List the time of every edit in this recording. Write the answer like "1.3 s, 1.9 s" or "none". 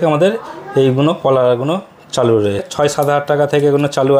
2.6 s